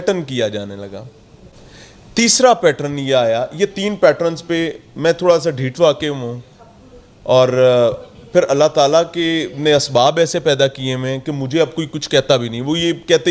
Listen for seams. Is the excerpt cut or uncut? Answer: uncut